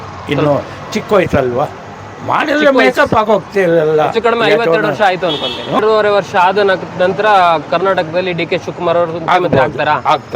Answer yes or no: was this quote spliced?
yes